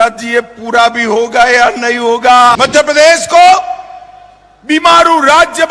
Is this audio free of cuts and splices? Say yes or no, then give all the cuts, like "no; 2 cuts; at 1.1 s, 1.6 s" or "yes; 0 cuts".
no; 1 cut; at 2.5 s